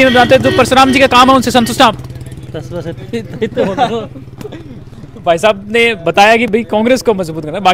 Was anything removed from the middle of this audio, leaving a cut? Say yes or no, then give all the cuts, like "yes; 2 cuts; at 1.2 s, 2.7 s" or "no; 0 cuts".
no; 0 cuts